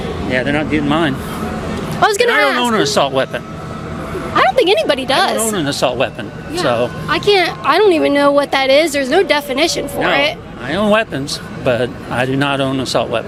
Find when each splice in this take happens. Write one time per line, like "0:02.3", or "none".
none